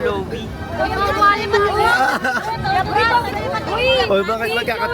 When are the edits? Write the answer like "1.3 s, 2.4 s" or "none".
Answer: none